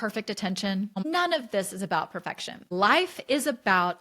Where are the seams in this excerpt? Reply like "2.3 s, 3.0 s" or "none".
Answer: 1.1 s, 2.6 s